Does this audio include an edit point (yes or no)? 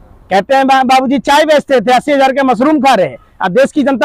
no